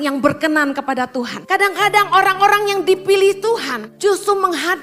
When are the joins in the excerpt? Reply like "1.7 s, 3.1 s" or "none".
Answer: 1.4 s, 3.8 s